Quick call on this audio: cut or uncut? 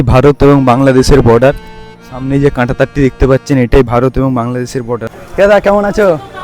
cut